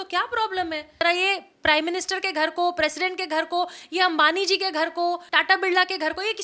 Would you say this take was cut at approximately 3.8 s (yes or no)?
no